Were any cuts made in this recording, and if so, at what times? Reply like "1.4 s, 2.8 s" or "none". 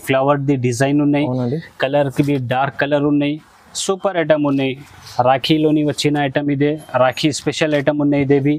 none